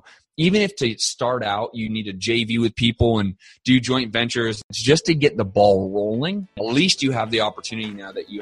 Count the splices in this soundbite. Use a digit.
2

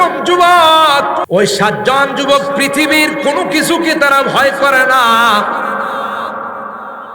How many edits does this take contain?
1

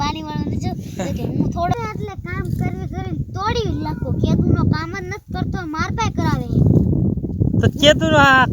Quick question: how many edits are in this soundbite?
1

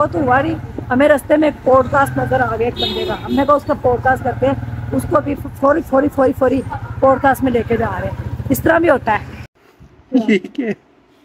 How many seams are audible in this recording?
0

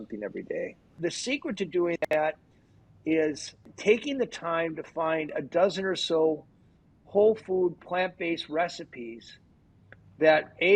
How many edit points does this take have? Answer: 2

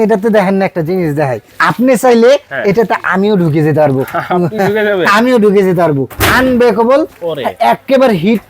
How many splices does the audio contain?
2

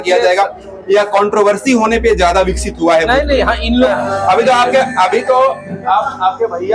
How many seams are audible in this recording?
1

